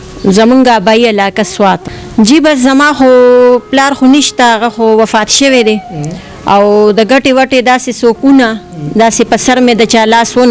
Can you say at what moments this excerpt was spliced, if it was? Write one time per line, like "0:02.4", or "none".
0:02.0